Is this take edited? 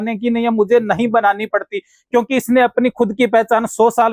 no; 0 cuts

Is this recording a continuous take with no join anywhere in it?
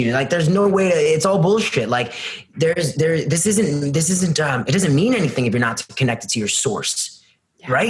yes; 0 cuts

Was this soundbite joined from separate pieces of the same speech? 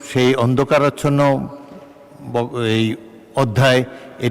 no; 0 cuts

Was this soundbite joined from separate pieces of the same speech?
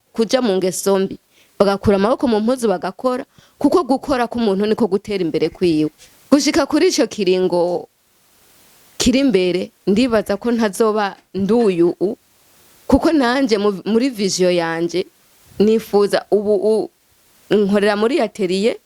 yes; 1 cut; at 6.1 s

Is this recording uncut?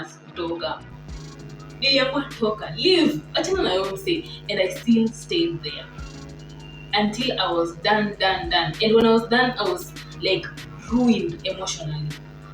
yes; 0 cuts

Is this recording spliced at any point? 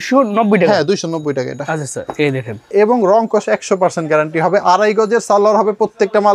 yes; 1 cut; at 2.7 s

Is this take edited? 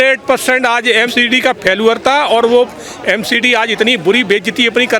yes; 1 cut; at 1.1 s

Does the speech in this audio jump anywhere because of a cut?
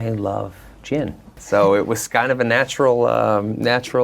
yes; 1 cut; at 1.4 s

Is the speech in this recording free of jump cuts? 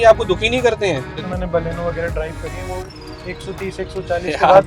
no; 1 cut; at 1.1 s

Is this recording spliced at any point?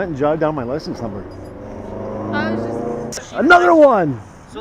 yes; 1 cut; at 3.3 s

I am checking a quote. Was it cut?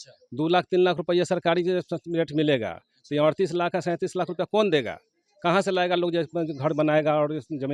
no; 0 cuts

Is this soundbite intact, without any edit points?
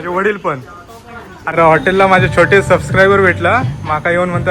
no; 1 cut; at 1.5 s

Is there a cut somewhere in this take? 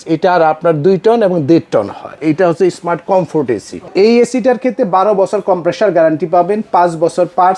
yes; 2 cuts; at 2.2 s, 3.9 s

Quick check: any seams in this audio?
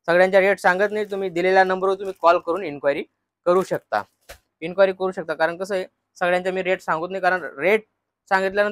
no; 0 cuts

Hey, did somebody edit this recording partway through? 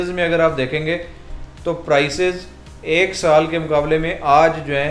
no; 0 cuts

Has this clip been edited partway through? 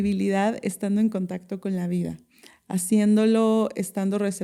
no; 0 cuts

